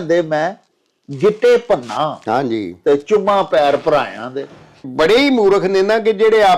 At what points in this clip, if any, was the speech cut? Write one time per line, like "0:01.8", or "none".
0:04.9